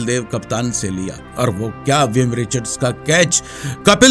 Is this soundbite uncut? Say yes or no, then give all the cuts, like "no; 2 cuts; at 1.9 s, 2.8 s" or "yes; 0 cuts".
no; 1 cut; at 1.2 s